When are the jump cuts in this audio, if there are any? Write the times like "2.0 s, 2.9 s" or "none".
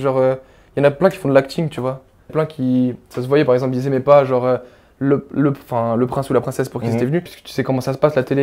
2.3 s, 7.4 s